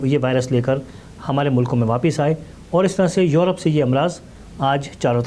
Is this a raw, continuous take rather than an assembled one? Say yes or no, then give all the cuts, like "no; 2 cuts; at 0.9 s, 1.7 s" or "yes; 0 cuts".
yes; 0 cuts